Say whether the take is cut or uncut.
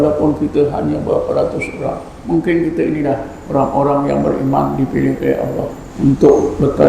cut